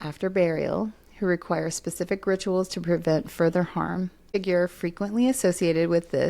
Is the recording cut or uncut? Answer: cut